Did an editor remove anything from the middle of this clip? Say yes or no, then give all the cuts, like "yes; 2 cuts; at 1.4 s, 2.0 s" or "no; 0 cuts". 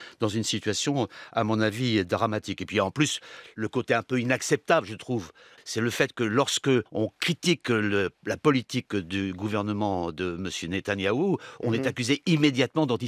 yes; 2 cuts; at 5.5 s, 6.9 s